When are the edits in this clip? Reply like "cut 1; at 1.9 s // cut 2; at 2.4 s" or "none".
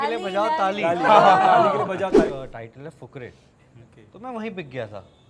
cut 1; at 2.3 s

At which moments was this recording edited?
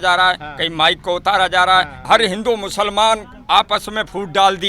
cut 1; at 2.1 s

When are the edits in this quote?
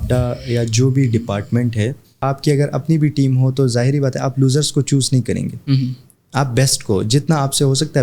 cut 1; at 2.2 s

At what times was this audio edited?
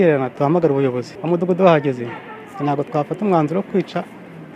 cut 1; at 1.1 s

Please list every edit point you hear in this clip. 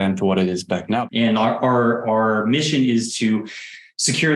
cut 1; at 1.0 s

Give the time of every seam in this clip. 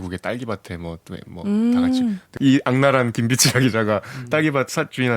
cut 1; at 2.3 s

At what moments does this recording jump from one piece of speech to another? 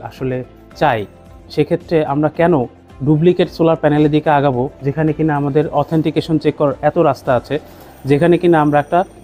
none

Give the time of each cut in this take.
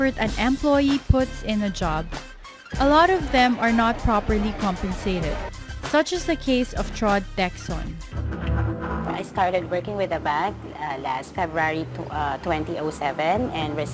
cut 1; at 12.6 s

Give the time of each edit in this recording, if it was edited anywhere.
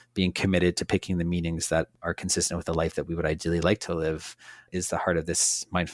cut 1; at 1.9 s // cut 2; at 4.7 s

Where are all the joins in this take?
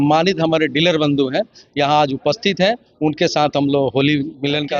none

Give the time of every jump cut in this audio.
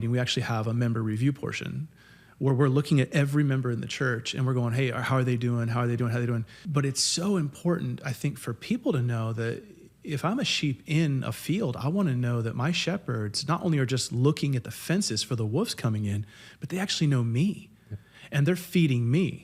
cut 1; at 6.6 s

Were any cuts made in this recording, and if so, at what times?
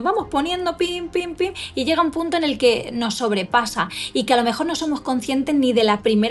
none

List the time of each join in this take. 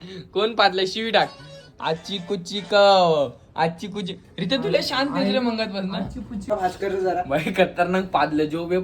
cut 1; at 6.5 s

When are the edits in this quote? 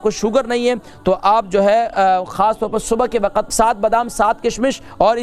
cut 1; at 3.5 s

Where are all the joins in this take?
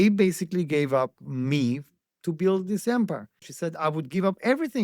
cut 1; at 3.5 s

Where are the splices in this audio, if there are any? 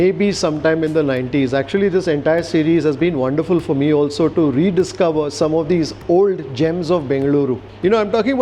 none

